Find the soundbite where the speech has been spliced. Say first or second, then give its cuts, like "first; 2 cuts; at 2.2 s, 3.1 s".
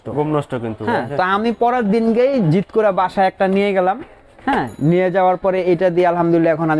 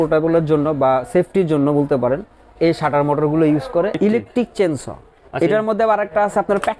second; 1 cut; at 4.0 s